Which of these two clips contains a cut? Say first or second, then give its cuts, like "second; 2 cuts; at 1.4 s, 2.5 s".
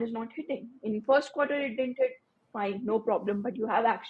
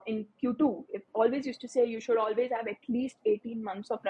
second; 1 cut; at 1.0 s